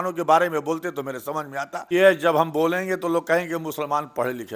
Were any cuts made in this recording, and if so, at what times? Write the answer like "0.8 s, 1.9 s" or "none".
1.8 s